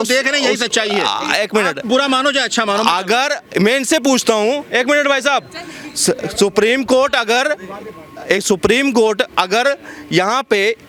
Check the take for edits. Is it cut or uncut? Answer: uncut